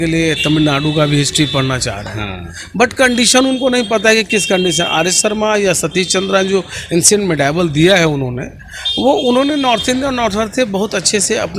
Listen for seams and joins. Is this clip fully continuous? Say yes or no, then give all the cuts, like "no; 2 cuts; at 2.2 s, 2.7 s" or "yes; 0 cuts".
yes; 0 cuts